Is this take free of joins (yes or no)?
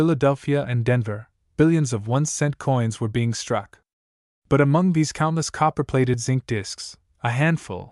yes